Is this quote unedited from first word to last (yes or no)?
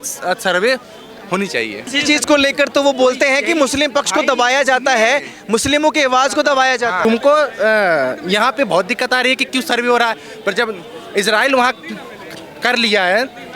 no